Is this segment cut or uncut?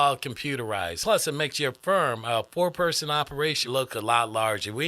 cut